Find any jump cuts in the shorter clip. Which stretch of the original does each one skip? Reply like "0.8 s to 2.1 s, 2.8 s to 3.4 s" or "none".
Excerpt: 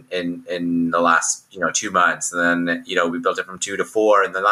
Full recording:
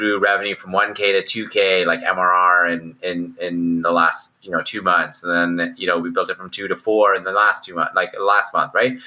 none